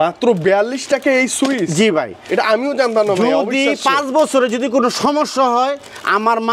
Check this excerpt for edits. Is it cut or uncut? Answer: uncut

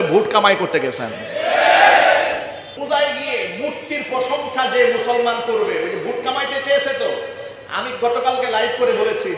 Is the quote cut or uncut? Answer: cut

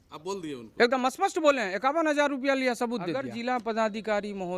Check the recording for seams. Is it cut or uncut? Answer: cut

